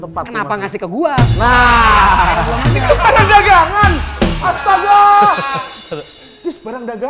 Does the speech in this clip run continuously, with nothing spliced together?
yes; 0 cuts

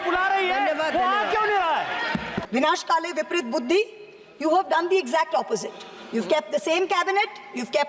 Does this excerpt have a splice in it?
yes; 1 cut; at 2.4 s

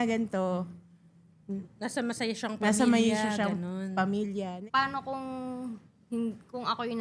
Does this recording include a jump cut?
yes; 1 cut; at 4.6 s

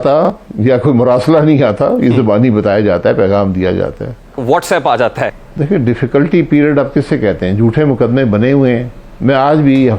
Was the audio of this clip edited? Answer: yes; 1 cut; at 5.4 s

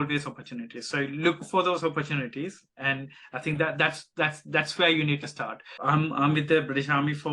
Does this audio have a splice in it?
yes; 1 cut; at 5.6 s

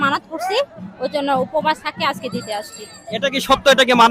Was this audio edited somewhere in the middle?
no; 0 cuts

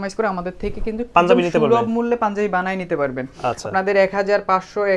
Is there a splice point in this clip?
no; 0 cuts

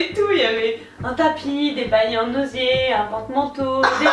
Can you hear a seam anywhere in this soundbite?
no; 0 cuts

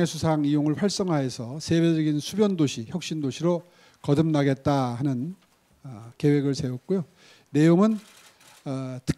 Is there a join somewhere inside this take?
no; 0 cuts

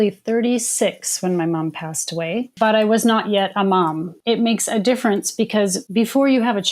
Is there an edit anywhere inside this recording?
yes; 3 cuts; at 2.5 s, 4.1 s, 5.8 s

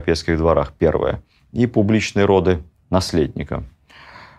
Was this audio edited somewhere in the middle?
no; 0 cuts

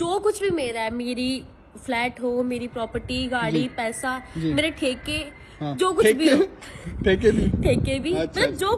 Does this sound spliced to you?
no; 0 cuts

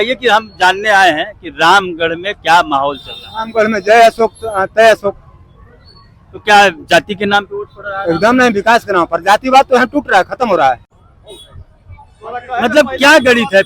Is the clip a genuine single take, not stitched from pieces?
no; 1 cut; at 10.9 s

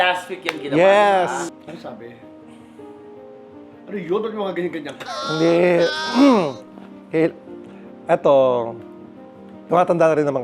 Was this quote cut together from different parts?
yes; 1 cut; at 1.4 s

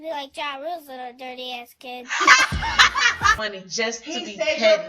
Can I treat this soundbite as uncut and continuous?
no; 1 cut; at 3.4 s

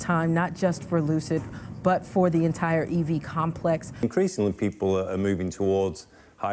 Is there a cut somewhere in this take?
yes; 1 cut; at 4.0 s

